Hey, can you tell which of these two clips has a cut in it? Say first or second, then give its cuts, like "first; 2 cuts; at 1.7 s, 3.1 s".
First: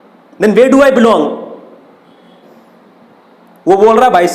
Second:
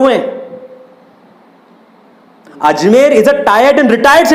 first; 1 cut; at 2.4 s